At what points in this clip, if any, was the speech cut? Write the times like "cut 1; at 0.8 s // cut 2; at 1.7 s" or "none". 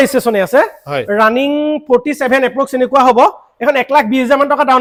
none